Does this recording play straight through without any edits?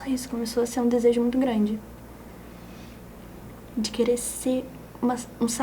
yes; 0 cuts

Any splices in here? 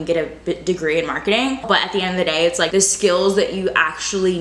yes; 2 cuts; at 1.6 s, 2.7 s

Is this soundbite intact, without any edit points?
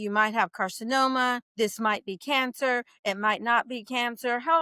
no; 1 cut; at 1.5 s

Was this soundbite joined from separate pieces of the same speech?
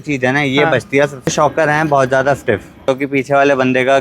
yes; 2 cuts; at 1.3 s, 2.9 s

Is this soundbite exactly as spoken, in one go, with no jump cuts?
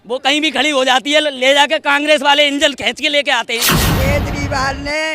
no; 1 cut; at 3.8 s

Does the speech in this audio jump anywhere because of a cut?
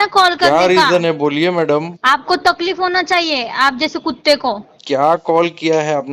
no; 0 cuts

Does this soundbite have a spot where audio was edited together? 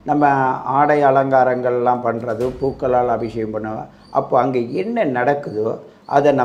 no; 0 cuts

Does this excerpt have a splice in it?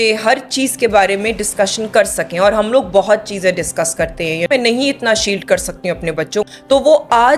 yes; 2 cuts; at 4.5 s, 6.5 s

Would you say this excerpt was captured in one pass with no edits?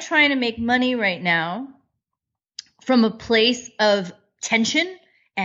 yes; 0 cuts

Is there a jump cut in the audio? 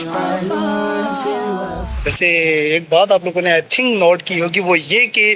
yes; 1 cut; at 1.8 s

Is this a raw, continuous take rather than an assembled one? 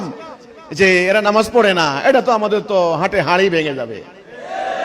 yes; 0 cuts

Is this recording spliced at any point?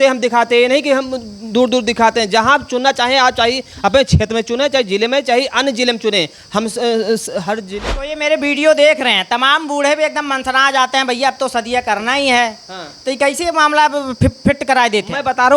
yes; 1 cut; at 7.7 s

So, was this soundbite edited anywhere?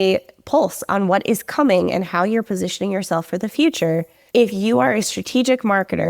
yes; 1 cut; at 4.1 s

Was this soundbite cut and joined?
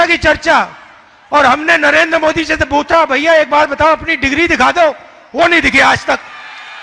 no; 0 cuts

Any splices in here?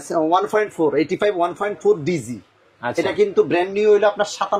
no; 0 cuts

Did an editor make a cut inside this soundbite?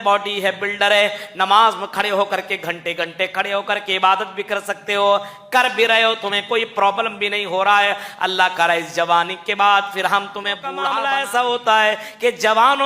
yes; 1 cut; at 10.8 s

